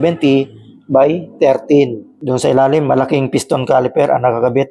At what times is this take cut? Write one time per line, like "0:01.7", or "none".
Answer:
0:02.1